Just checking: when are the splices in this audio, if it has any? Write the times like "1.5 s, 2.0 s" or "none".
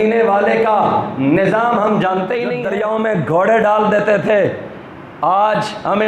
2.6 s